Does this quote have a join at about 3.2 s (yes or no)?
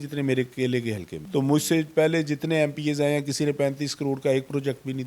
no